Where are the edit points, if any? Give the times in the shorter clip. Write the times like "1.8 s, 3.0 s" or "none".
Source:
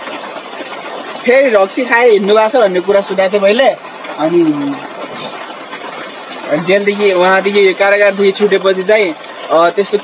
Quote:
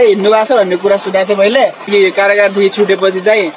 1.9 s

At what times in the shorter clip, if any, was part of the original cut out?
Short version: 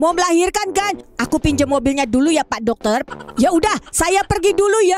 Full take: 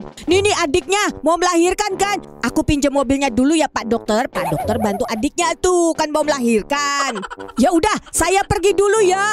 3.1 s

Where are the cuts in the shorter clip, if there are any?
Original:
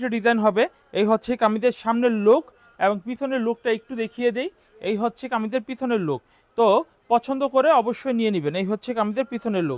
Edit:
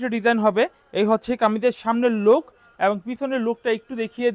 none

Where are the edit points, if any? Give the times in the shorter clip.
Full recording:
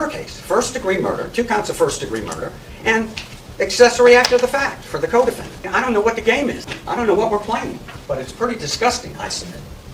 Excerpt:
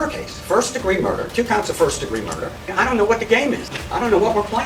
2.6 s

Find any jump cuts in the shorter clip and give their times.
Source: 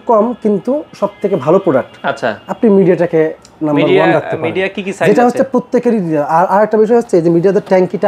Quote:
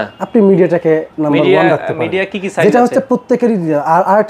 1.1 s

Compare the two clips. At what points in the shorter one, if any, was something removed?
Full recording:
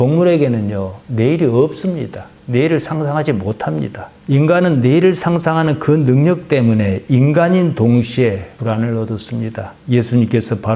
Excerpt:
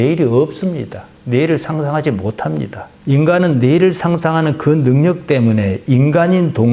none

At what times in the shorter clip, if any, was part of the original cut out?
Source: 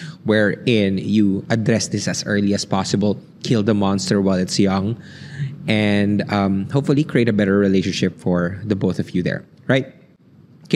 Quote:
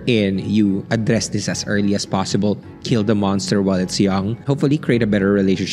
4.4 s

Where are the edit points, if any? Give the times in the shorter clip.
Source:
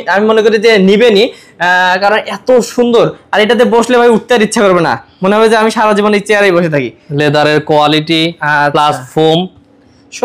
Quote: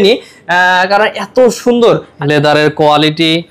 2.1 s

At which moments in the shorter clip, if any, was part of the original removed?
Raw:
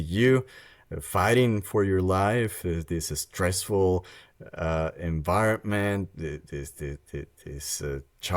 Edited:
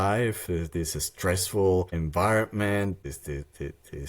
1.9 s, 3.1 s

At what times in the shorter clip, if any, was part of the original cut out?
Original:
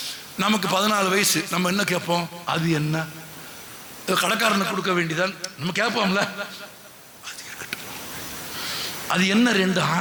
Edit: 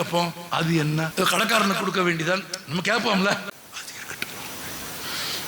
1.1 s, 3.5 s

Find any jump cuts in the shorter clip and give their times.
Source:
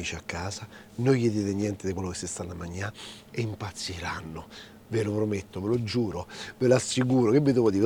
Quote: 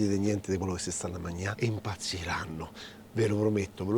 1.5 s

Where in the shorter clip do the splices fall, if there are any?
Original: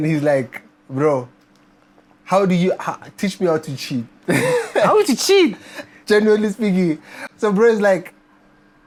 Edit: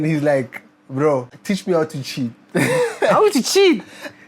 1.3 s

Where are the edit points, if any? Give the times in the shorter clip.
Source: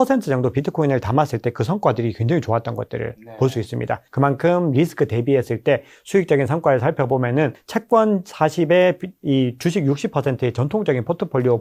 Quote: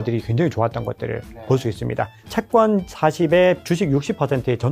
2.2 s, 3.6 s

